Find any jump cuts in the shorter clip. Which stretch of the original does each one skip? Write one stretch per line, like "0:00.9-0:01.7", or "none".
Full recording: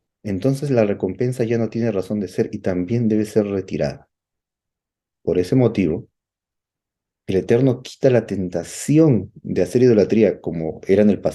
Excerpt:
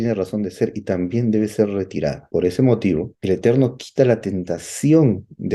0:04.0-0:05.1
0:06.1-0:07.2